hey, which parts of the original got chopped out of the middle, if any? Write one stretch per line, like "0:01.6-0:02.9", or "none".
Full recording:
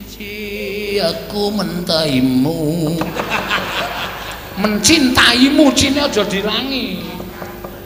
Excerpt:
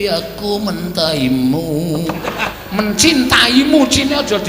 0:03.4-0:04.4